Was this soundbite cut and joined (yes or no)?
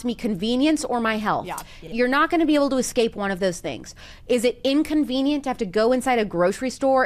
yes